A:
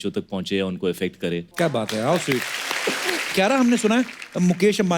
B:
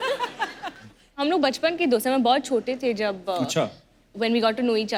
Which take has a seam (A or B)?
A